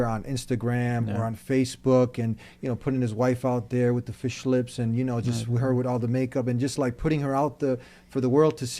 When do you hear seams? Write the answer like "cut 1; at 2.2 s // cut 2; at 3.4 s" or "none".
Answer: none